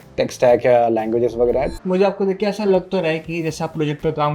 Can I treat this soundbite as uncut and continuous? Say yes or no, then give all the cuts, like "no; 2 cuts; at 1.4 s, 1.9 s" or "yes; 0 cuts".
no; 1 cut; at 1.8 s